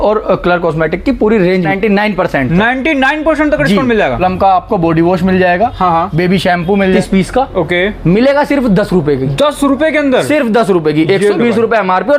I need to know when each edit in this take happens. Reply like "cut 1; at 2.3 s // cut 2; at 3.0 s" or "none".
cut 1; at 1.7 s // cut 2; at 4.2 s // cut 3; at 7.0 s